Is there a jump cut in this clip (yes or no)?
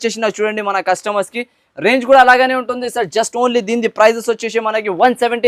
no